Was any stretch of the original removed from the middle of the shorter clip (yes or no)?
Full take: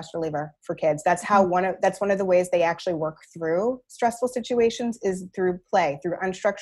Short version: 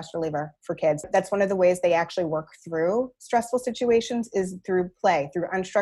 yes